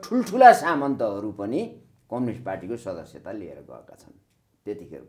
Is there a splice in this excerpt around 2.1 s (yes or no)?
no